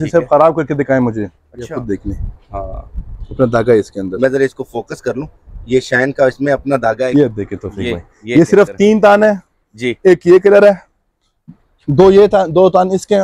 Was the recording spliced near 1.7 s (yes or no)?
yes